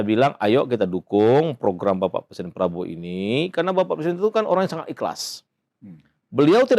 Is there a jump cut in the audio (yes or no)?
no